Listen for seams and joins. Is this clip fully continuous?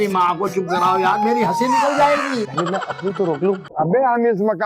no; 1 cut; at 3.7 s

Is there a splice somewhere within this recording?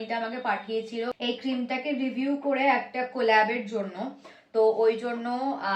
no; 0 cuts

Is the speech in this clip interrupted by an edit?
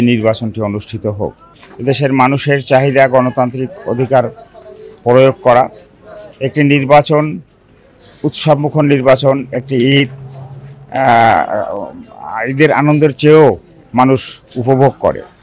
no; 0 cuts

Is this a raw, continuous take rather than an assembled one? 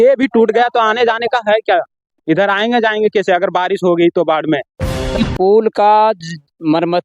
no; 1 cut; at 5.1 s

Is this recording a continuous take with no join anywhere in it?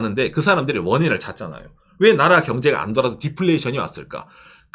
yes; 0 cuts

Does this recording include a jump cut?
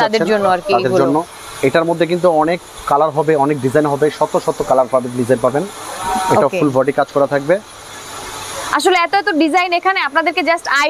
no; 0 cuts

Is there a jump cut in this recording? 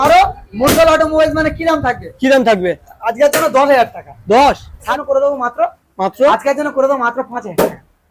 yes; 1 cut; at 4.9 s

